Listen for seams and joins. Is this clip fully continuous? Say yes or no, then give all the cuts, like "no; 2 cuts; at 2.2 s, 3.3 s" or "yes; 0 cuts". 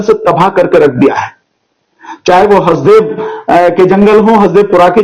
yes; 0 cuts